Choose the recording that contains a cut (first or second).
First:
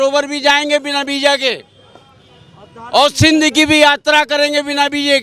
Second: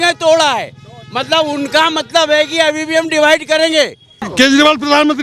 second